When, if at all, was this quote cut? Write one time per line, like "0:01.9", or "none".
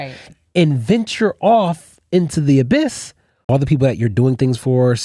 0:03.4